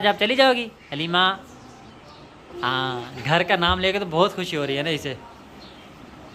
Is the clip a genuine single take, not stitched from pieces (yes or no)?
yes